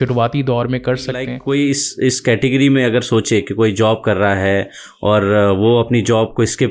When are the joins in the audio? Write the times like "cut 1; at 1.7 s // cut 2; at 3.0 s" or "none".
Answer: cut 1; at 1.3 s